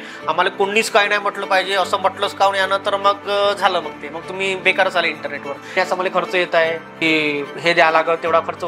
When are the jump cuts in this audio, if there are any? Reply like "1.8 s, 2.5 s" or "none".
5.7 s, 7.0 s